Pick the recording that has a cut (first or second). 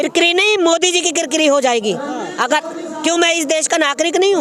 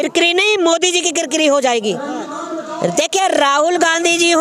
second